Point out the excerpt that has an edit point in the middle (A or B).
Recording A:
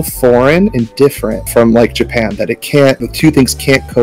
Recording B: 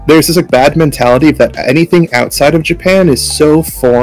A